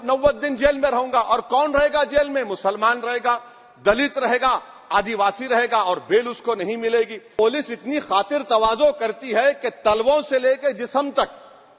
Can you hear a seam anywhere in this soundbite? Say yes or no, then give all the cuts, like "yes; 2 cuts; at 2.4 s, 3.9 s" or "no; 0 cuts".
yes; 1 cut; at 7.3 s